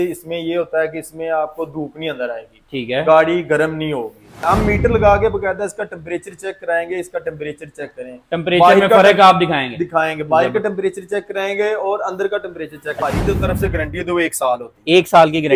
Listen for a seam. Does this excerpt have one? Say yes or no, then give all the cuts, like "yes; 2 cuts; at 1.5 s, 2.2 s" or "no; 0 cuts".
yes; 2 cuts; at 4.4 s, 13.0 s